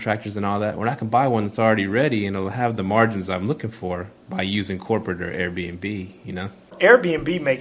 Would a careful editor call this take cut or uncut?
cut